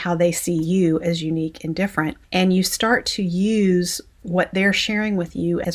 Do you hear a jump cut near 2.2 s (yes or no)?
yes